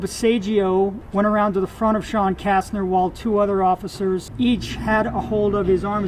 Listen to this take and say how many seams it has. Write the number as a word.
two